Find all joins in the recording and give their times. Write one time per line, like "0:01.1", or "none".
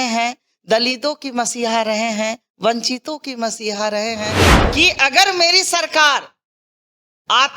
0:04.4